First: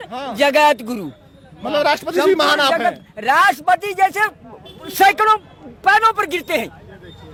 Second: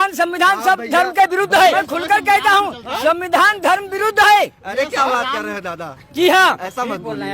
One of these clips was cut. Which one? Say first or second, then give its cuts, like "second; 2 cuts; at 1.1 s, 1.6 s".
second; 1 cut; at 1.7 s